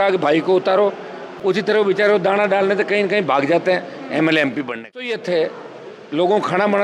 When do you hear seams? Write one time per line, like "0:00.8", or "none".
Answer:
0:01.3
0:05.2